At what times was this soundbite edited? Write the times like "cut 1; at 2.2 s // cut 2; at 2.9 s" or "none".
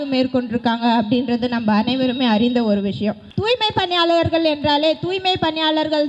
cut 1; at 3.3 s